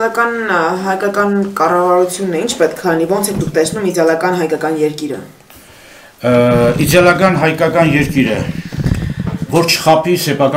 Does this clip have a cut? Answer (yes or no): no